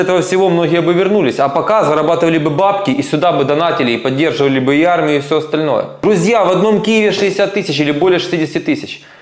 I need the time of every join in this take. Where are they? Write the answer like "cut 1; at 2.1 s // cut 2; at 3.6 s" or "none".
cut 1; at 5.9 s